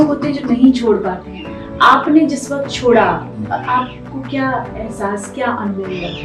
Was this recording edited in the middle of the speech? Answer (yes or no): no